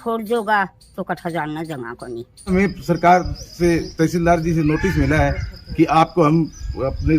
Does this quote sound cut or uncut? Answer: cut